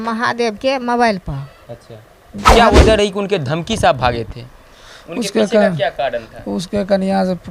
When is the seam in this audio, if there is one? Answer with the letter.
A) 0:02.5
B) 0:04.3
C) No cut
A